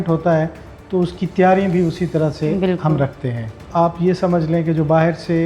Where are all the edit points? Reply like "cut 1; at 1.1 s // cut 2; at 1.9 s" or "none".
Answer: cut 1; at 3.6 s